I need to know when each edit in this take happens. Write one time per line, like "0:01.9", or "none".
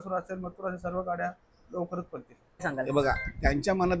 0:02.7